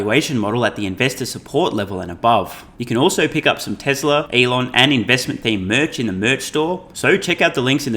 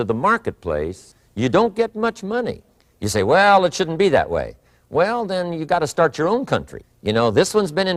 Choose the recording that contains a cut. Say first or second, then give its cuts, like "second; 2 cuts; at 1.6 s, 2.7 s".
first; 3 cuts; at 2.7 s, 4.3 s, 6.9 s